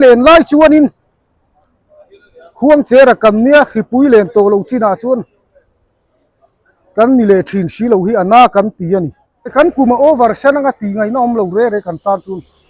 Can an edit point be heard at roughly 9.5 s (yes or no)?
no